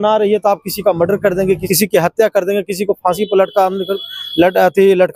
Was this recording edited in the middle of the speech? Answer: no; 0 cuts

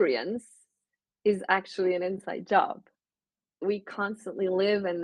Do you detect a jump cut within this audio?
yes; 1 cut; at 3.6 s

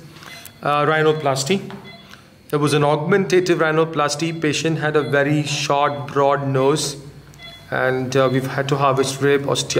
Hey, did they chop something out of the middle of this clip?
no; 0 cuts

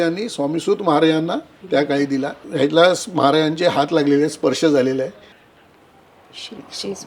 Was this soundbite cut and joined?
yes; 2 cuts; at 1.5 s, 5.4 s

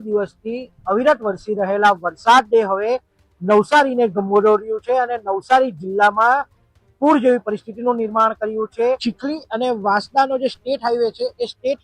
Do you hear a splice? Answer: yes; 1 cut; at 9.1 s

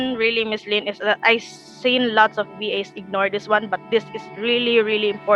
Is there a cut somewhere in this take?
no; 0 cuts

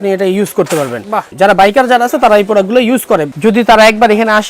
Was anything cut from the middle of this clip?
yes; 2 cuts; at 1.2 s, 3.3 s

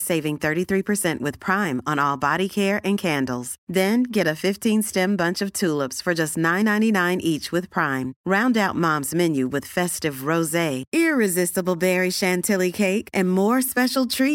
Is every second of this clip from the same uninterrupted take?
yes; 0 cuts

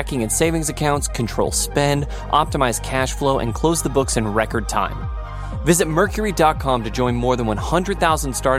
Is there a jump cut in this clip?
no; 0 cuts

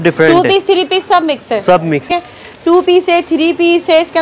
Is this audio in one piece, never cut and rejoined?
no; 1 cut; at 2.1 s

